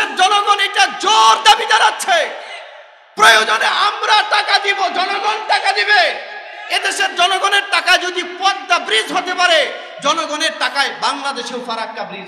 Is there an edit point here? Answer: no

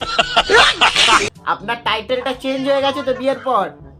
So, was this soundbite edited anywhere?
yes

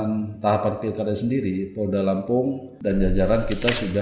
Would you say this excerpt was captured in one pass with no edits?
no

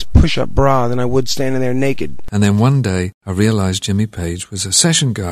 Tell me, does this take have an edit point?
yes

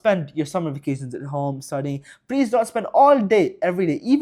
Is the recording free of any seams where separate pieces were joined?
yes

